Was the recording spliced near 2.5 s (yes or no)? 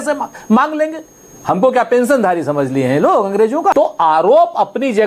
no